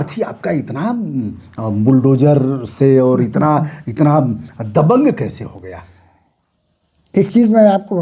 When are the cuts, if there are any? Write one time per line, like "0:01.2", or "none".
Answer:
none

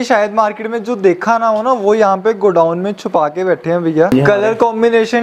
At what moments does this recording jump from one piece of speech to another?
0:04.1

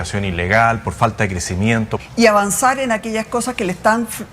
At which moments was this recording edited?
0:01.9

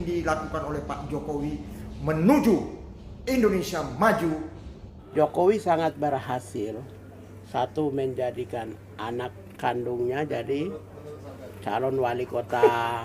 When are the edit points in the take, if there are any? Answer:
0:05.0

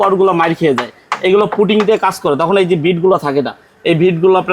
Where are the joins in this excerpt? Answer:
none

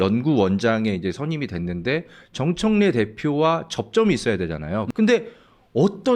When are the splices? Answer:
0:04.8

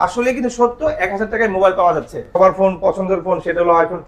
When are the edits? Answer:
0:02.4

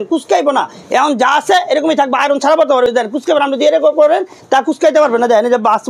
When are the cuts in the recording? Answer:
none

